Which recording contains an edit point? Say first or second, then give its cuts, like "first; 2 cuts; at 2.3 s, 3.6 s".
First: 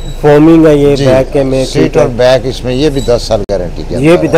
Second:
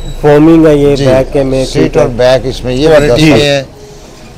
second; 1 cut; at 2.9 s